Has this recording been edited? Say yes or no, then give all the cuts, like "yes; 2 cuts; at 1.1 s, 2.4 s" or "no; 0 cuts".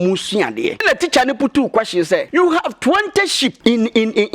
yes; 3 cuts; at 0.8 s, 2.3 s, 3.6 s